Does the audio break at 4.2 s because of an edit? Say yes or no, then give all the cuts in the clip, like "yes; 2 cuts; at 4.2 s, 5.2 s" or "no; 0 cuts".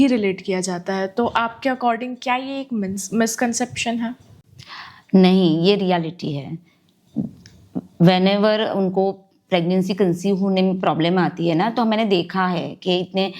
no; 0 cuts